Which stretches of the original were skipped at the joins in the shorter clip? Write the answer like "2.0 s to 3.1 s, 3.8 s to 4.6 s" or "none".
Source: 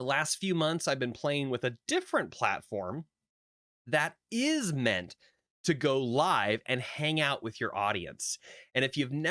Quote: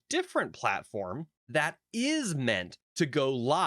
3.1 s to 3.7 s, 5.1 s to 5.4 s